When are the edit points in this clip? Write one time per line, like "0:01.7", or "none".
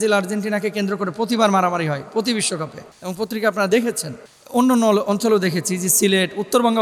none